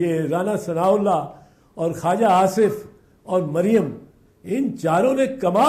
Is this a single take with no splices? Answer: yes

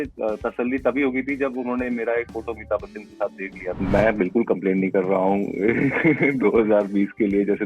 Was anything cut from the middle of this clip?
yes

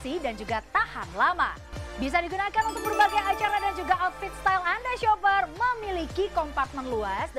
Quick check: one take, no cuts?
no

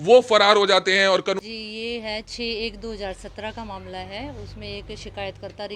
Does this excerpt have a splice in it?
yes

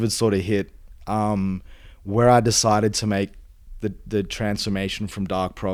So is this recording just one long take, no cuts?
yes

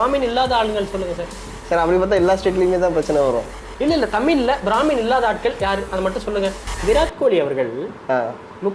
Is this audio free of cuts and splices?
no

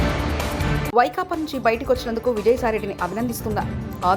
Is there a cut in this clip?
no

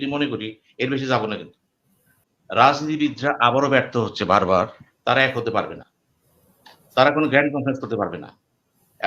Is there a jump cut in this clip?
yes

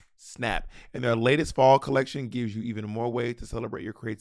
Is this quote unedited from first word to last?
yes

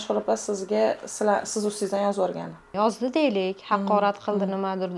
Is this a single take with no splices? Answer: no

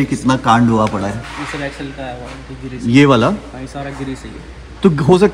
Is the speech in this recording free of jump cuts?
yes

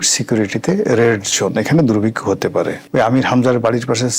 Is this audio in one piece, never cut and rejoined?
no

